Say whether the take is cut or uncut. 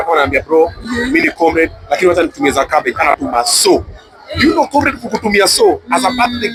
uncut